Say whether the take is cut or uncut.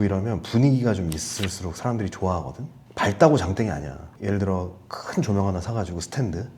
cut